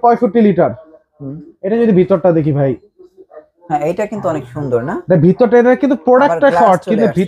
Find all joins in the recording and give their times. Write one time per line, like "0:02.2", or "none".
none